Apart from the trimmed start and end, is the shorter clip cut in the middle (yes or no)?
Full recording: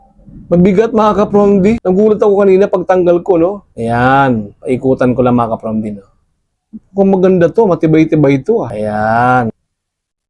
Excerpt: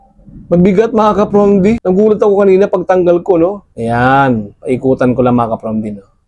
no